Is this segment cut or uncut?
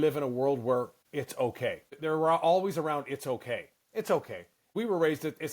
cut